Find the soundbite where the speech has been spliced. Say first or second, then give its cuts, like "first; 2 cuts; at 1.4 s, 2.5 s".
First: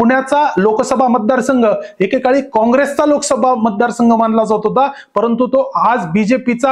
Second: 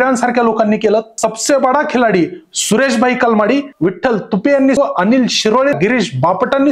second; 4 cuts; at 1.1 s, 3.7 s, 4.8 s, 5.7 s